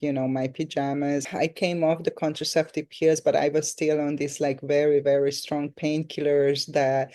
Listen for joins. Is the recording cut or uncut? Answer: uncut